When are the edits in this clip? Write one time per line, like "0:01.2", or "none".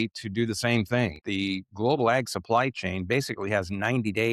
0:01.2